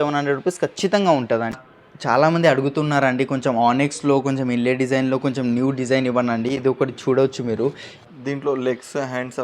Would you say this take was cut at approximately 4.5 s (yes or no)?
no